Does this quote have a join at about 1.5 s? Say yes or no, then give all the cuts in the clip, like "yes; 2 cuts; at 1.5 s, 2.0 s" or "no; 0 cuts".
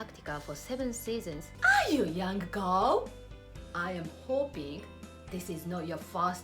yes; 1 cut; at 1.5 s